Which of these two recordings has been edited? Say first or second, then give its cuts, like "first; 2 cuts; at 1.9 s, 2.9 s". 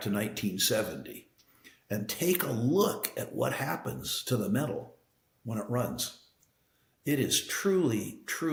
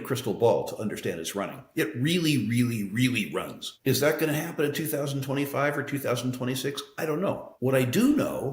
second; 1 cut; at 7.5 s